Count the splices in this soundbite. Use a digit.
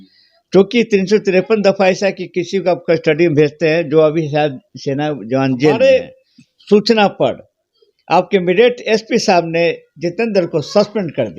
1